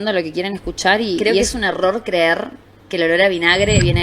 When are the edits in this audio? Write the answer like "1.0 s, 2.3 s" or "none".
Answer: 1.3 s